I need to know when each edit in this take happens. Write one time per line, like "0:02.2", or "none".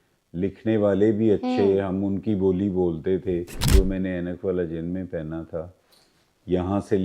0:03.7